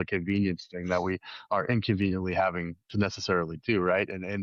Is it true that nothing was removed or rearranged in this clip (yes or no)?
yes